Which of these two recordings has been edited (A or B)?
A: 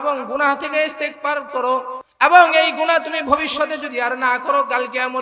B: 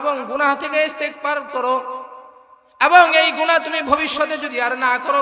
A